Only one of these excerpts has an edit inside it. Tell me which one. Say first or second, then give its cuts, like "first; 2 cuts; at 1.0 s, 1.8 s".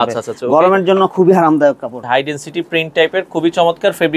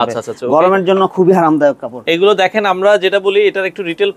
first; 1 cut; at 2.0 s